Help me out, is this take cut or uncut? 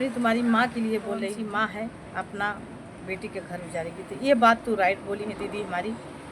cut